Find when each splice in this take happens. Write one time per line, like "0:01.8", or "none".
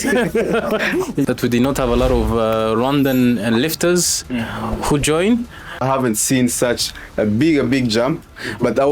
0:01.2
0:05.8

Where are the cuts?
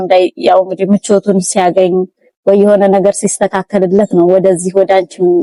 none

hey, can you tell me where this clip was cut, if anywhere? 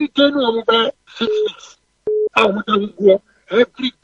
0:01.1

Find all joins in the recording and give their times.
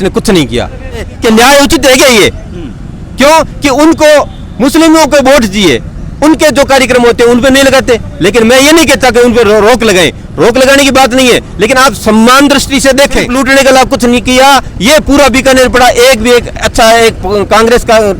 0:01.1
0:13.3

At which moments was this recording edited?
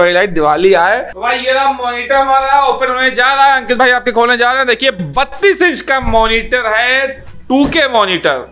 0:01.1

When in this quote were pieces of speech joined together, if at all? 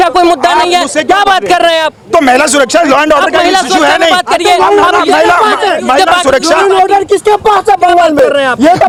none

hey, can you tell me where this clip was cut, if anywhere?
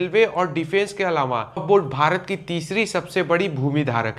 0:01.6

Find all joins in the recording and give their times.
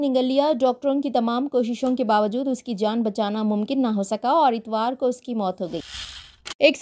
0:05.9

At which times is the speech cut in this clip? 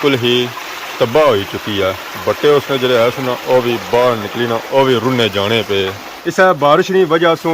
0:04.6
0:06.0

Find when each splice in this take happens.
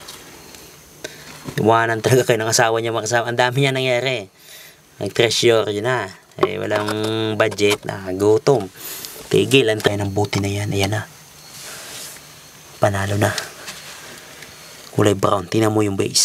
0:09.9

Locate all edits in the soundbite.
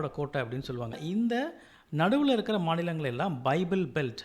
0:01.0

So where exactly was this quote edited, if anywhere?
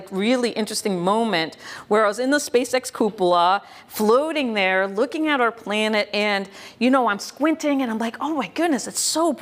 none

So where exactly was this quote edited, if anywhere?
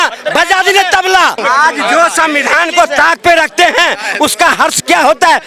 0:01.4

